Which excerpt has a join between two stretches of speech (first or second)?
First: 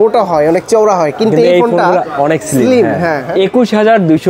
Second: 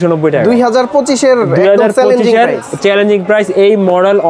first